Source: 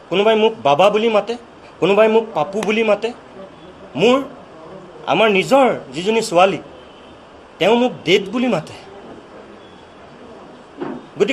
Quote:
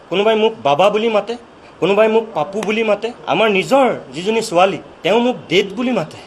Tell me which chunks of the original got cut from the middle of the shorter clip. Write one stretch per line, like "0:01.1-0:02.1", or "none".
0:03.1-0:04.9
0:06.7-0:07.4